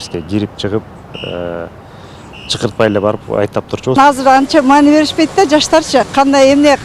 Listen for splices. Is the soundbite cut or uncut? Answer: cut